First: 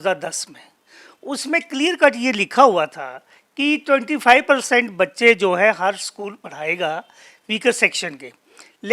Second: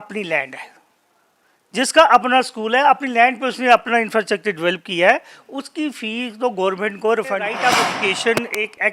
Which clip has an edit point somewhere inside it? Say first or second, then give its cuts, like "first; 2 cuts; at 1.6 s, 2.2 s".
second; 1 cut; at 7.6 s